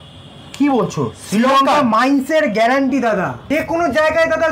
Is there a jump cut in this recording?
yes; 1 cut; at 3.4 s

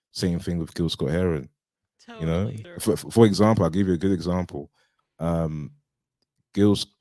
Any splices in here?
yes; 1 cut; at 2.7 s

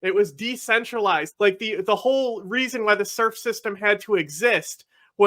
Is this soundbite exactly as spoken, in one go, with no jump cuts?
no; 1 cut; at 1.3 s

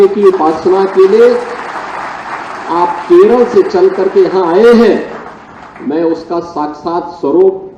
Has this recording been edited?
no; 0 cuts

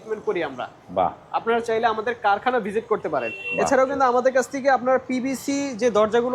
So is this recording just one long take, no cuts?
yes; 0 cuts

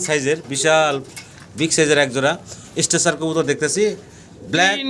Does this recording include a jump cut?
no; 0 cuts

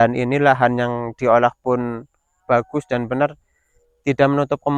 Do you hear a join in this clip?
no; 0 cuts

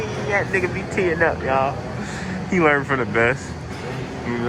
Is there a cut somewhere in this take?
no; 0 cuts

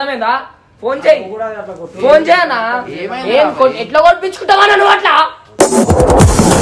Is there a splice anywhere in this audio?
no; 0 cuts

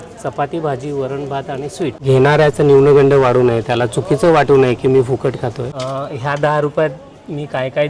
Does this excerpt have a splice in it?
yes; 2 cuts; at 2.0 s, 5.6 s

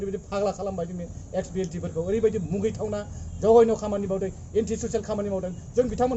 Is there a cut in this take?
no; 0 cuts

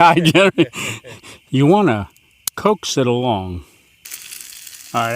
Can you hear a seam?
yes; 1 cut; at 3.6 s

